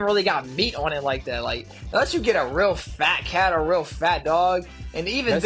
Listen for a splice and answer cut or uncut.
uncut